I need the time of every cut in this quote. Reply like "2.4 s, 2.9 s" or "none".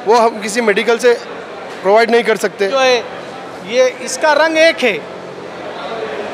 2.7 s

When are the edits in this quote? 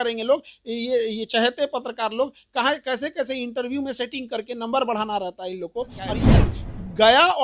6.2 s

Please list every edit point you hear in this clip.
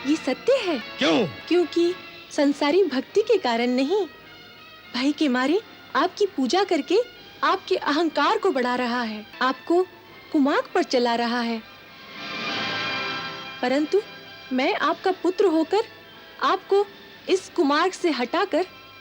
0.9 s, 9.2 s

